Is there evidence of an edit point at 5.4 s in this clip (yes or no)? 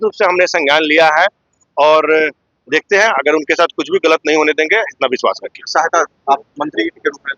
no